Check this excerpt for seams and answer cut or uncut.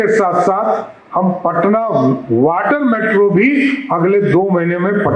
uncut